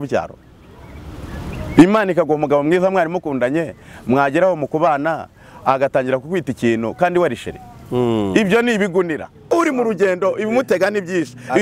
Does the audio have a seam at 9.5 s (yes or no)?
yes